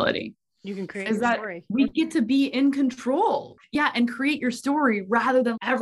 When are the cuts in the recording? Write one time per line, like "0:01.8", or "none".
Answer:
0:03.6

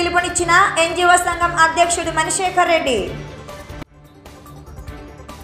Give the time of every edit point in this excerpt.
none

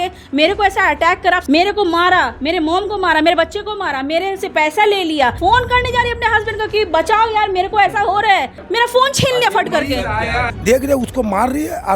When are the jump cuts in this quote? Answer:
0:01.4
0:05.4
0:08.6
0:10.2

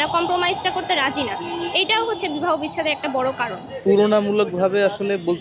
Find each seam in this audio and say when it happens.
0:03.7

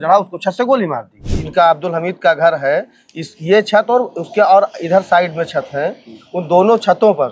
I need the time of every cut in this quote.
0:01.3

